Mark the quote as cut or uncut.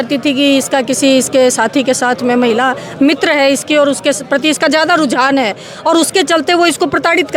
uncut